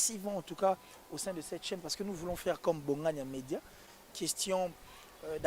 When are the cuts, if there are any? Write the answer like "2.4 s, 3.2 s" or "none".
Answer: none